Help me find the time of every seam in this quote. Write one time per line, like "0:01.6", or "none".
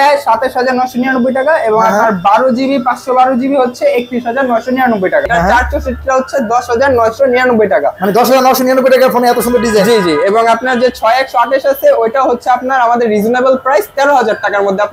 0:05.3